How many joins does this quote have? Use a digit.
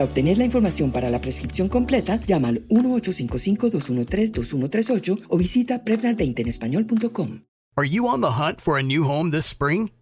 1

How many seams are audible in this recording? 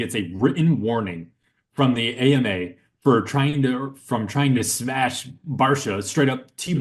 0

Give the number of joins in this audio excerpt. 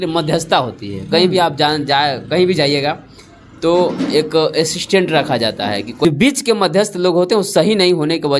1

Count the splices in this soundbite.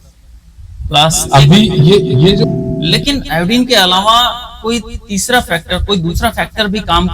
1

